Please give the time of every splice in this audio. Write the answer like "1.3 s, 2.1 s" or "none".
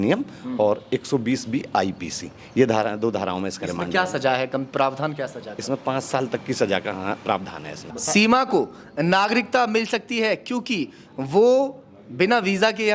7.9 s